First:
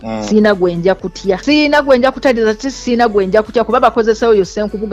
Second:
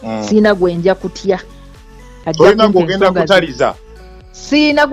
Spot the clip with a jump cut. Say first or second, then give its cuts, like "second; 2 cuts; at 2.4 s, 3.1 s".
first; 1 cut; at 1.4 s